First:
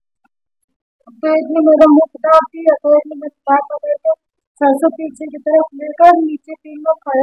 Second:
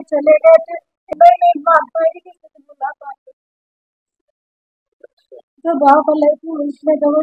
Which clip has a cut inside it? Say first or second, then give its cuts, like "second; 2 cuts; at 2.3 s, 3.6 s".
second; 2 cuts; at 1.1 s, 5.5 s